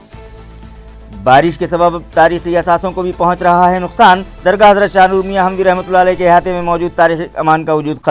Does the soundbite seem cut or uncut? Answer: cut